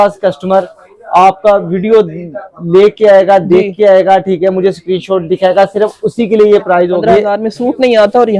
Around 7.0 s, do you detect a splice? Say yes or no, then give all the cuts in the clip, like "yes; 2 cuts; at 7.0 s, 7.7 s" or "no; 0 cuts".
yes; 1 cut; at 7.0 s